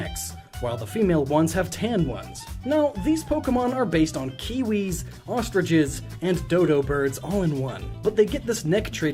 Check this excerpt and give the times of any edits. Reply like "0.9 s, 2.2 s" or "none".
none